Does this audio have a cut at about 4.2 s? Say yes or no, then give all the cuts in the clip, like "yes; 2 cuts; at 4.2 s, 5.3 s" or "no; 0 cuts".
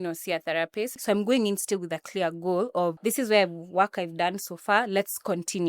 no; 2 cuts; at 1.0 s, 3.0 s